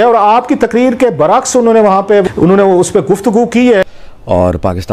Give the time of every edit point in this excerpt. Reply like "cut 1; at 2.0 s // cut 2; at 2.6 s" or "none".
cut 1; at 2.2 s // cut 2; at 3.9 s